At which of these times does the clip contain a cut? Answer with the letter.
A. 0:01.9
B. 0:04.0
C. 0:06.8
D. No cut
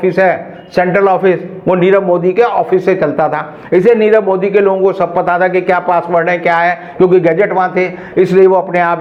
D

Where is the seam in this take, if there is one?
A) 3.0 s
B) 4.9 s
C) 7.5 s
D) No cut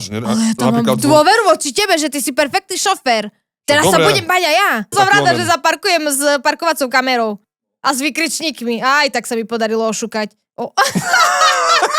B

